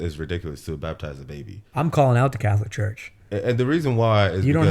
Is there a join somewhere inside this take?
yes; 1 cut; at 1.6 s

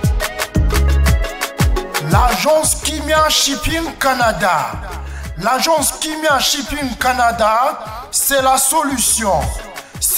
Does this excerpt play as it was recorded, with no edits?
no; 1 cut; at 2.0 s

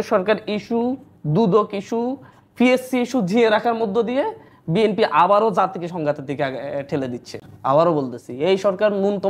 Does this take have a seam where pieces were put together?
yes; 1 cut; at 7.4 s

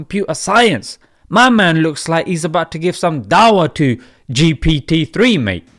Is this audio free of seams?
yes; 0 cuts

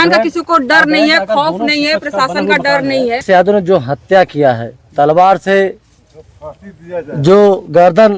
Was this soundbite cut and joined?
yes; 1 cut; at 3.2 s

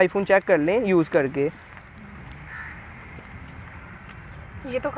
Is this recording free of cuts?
yes; 0 cuts

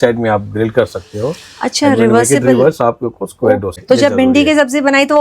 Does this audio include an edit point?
yes; 1 cut; at 3.7 s

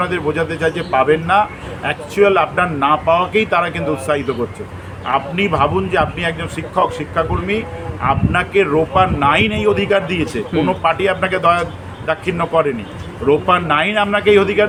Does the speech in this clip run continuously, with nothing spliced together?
yes; 0 cuts

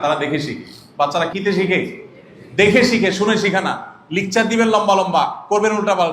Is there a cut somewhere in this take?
yes; 1 cut; at 1.3 s

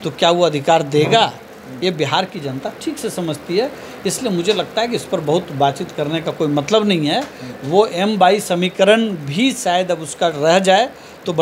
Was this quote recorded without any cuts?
yes; 0 cuts

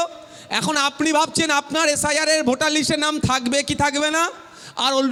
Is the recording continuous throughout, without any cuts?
yes; 0 cuts

